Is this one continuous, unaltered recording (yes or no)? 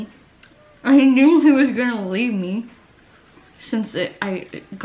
yes